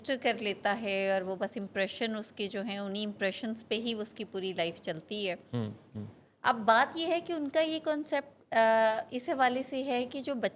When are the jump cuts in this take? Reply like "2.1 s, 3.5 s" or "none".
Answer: none